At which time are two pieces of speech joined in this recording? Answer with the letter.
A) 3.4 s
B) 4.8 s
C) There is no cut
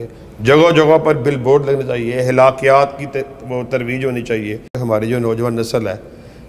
B